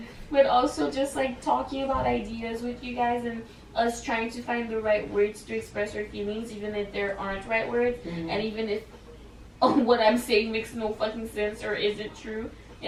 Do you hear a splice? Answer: no; 0 cuts

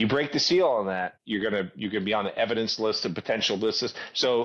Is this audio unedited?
no; 1 cut; at 1.2 s

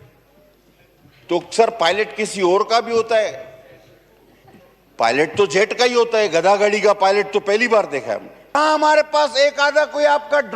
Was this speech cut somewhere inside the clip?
yes; 1 cut; at 8.6 s

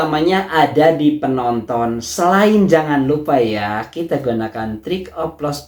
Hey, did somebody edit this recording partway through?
no; 0 cuts

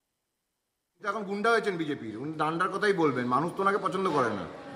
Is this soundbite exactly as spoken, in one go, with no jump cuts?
no; 1 cut; at 1.0 s

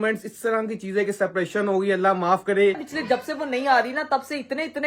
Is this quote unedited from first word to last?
no; 1 cut; at 2.8 s

